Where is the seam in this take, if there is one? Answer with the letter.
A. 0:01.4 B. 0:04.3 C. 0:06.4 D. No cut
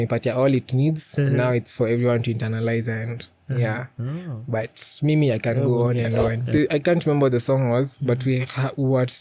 C